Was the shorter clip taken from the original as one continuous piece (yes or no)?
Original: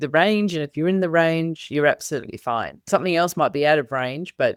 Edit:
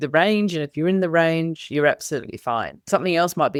yes